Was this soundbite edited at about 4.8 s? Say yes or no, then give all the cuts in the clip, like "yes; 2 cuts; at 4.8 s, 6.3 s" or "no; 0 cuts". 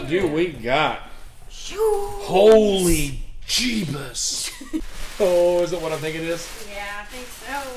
yes; 1 cut; at 4.8 s